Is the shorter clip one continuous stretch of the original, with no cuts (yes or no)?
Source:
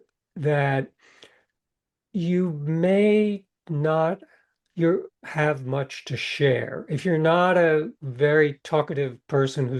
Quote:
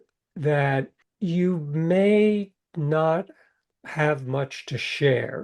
no